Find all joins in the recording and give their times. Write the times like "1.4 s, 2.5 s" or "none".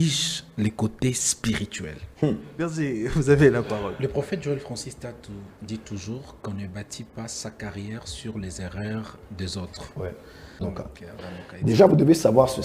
2.8 s, 10.6 s

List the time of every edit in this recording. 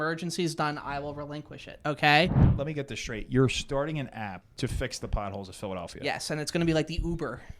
2.5 s, 4.4 s

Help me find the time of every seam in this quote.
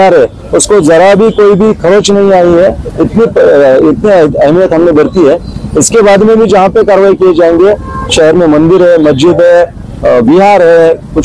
none

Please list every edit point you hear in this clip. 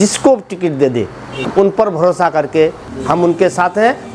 1.4 s, 2.9 s

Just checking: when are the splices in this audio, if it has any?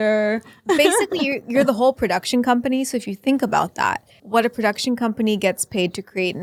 none

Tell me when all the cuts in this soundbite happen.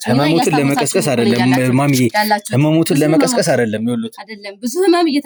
none

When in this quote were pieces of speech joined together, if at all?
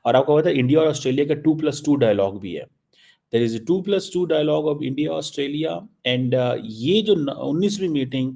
none

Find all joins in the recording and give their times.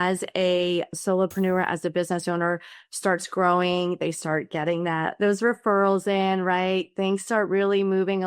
1.0 s

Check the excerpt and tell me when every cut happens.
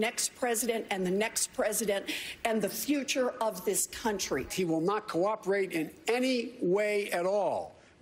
4.5 s

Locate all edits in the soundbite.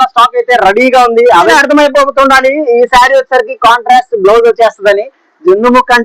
1.5 s

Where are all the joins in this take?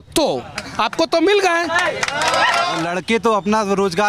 2.8 s

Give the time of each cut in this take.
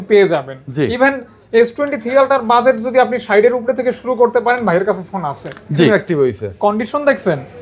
5.9 s

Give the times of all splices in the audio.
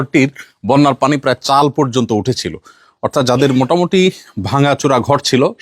none

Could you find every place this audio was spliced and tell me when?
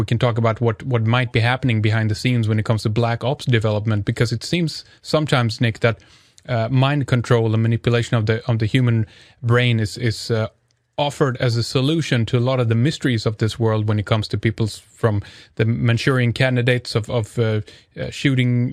none

